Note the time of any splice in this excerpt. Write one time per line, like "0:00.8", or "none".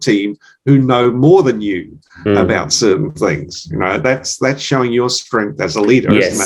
none